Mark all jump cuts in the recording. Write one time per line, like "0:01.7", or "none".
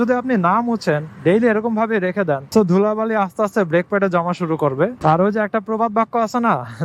0:02.4
0:05.0